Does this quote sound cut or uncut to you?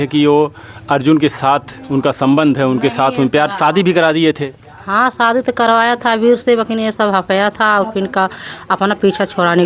uncut